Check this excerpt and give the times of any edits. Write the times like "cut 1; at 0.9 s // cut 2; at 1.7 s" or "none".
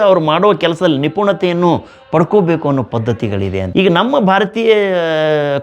cut 1; at 3.6 s